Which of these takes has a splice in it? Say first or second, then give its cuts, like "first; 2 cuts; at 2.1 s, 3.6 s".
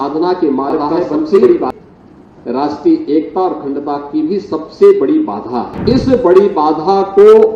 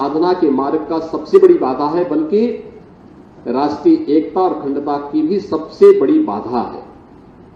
first; 2 cuts; at 1.7 s, 5.7 s